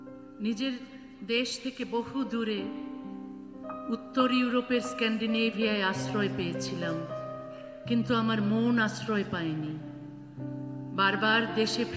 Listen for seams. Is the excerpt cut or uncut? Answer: uncut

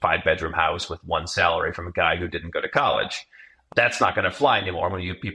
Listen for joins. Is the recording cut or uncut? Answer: uncut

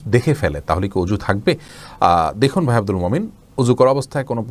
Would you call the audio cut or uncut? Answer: uncut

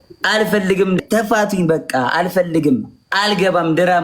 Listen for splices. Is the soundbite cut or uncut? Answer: cut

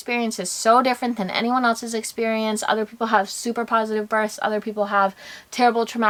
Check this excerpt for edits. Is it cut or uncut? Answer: uncut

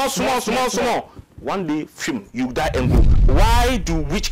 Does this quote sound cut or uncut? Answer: cut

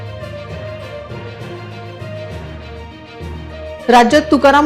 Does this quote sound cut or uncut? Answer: cut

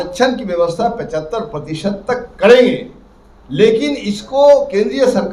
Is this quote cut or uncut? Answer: uncut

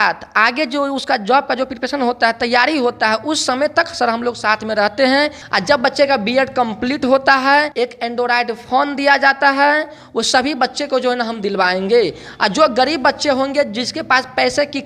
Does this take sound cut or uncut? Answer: cut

